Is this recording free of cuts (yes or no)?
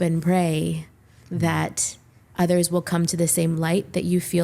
yes